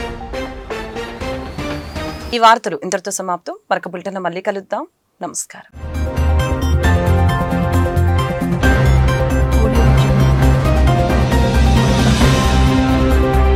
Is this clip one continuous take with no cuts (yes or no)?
yes